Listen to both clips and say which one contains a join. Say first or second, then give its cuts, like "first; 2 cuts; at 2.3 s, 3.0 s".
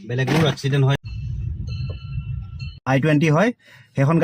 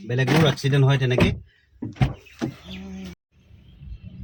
first; 2 cuts; at 1.0 s, 2.8 s